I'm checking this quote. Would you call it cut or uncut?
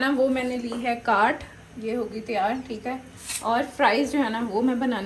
uncut